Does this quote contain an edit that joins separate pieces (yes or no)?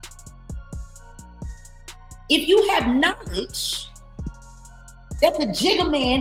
no